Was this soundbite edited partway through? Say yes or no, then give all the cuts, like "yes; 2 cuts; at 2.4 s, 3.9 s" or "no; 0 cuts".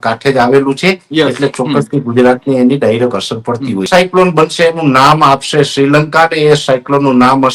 yes; 1 cut; at 3.9 s